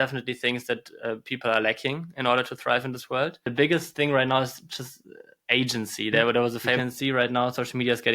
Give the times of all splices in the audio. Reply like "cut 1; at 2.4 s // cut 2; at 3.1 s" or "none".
cut 1; at 3.4 s // cut 2; at 6.9 s